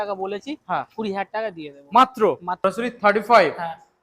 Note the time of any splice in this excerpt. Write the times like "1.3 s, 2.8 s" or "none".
2.6 s